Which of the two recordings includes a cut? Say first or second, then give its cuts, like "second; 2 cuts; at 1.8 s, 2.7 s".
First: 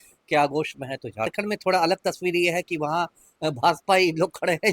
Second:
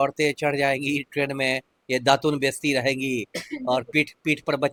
first; 1 cut; at 1.3 s